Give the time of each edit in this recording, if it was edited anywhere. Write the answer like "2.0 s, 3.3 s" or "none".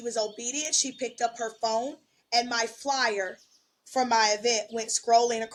none